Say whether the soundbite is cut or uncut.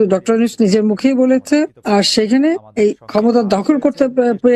cut